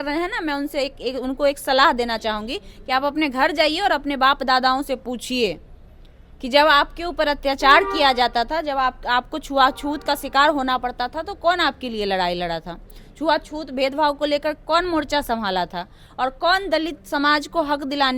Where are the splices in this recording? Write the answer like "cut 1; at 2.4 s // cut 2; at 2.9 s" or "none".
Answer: none